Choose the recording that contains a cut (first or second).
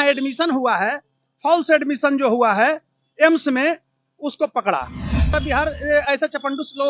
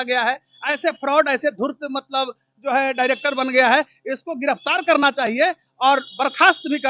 first